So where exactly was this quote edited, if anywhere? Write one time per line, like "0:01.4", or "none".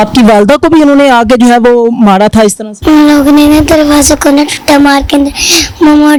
none